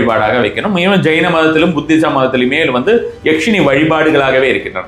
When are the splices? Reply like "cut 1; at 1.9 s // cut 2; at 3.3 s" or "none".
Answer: none